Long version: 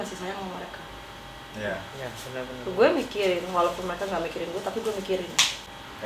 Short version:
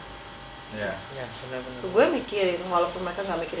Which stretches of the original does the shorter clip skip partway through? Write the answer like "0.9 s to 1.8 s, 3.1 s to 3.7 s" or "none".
none